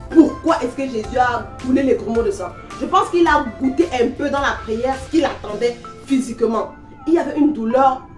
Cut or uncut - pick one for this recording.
uncut